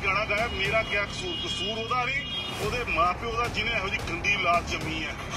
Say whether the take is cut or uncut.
uncut